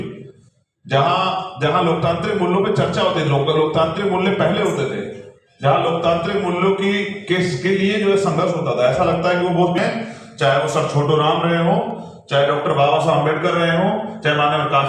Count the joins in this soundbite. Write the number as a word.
one